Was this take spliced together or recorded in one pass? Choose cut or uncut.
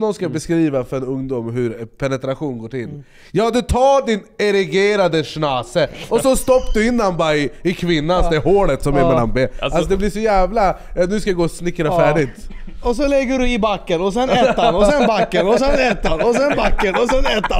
uncut